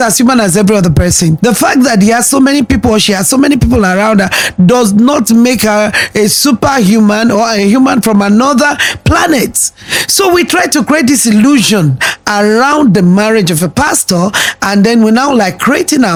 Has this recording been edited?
no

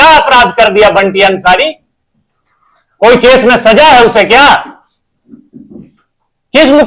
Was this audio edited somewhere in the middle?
no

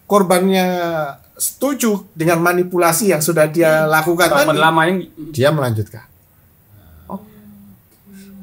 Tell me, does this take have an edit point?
no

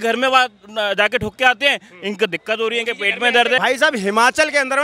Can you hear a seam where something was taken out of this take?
yes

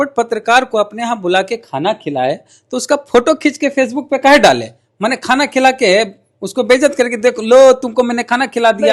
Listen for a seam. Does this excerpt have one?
no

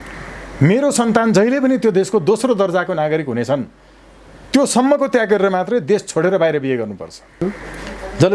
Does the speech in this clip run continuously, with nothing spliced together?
no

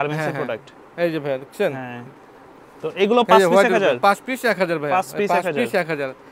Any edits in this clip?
no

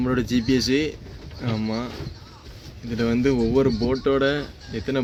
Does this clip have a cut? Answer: no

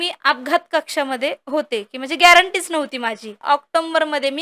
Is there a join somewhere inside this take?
yes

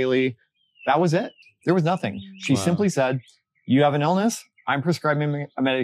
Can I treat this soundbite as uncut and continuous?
no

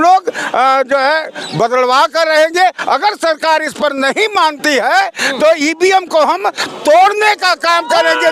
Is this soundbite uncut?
yes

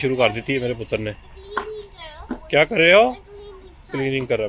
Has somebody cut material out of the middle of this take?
no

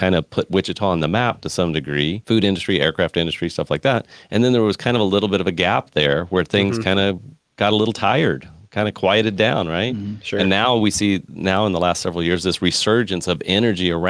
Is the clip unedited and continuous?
no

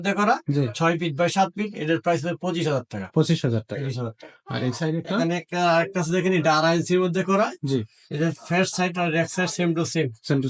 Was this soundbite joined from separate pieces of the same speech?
no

